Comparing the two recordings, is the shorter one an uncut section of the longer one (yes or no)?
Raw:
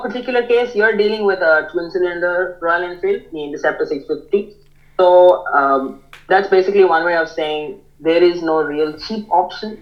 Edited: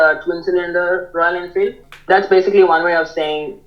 no